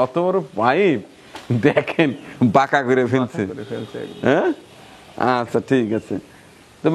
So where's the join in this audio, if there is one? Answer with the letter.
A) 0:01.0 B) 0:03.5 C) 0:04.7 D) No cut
D